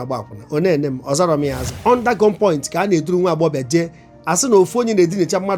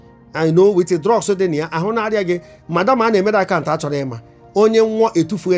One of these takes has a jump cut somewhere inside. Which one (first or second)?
first